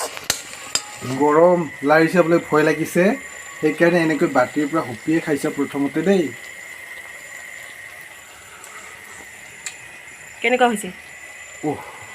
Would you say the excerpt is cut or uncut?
cut